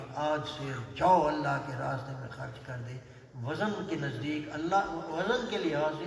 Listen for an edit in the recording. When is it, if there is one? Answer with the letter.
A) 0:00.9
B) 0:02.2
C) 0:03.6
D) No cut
D